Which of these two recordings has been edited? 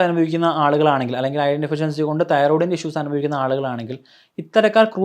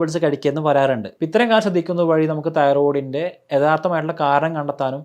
second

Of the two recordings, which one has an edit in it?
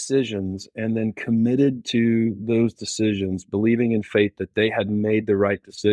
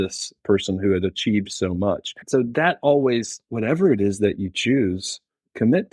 second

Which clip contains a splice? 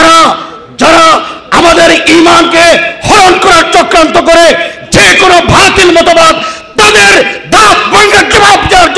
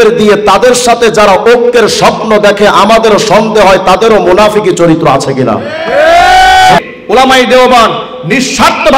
second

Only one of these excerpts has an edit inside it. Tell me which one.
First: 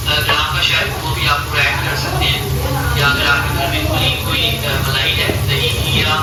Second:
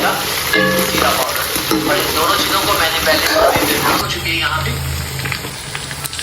second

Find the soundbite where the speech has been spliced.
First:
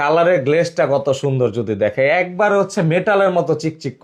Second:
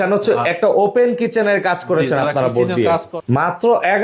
second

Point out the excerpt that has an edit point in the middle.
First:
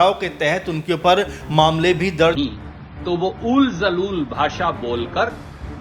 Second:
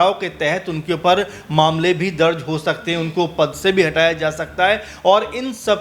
first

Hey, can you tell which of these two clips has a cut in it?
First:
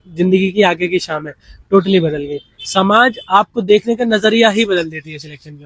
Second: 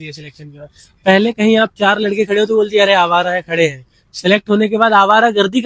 first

